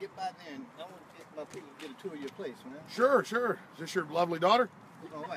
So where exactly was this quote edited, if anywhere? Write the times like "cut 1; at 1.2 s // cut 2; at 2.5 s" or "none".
none

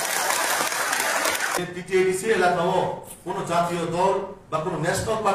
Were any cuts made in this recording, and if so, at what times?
cut 1; at 1.6 s

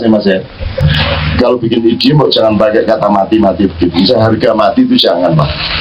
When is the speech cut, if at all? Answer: cut 1; at 1.0 s

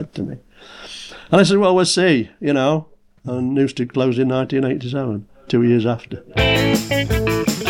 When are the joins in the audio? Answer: cut 1; at 6.3 s

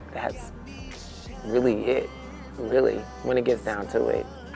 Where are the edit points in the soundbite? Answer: none

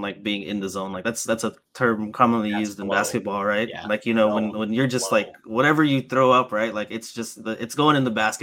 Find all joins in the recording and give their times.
none

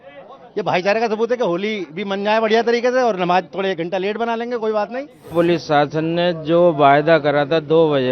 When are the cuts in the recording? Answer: cut 1; at 5.4 s

